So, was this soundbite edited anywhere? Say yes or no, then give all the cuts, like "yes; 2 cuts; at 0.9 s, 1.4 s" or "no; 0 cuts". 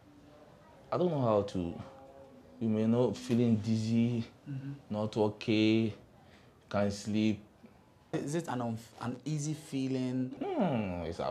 yes; 1 cut; at 8.1 s